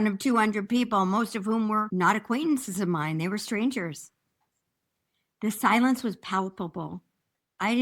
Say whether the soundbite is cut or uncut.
cut